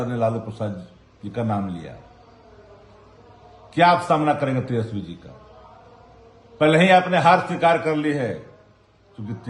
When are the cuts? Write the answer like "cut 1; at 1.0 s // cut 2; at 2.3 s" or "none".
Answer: none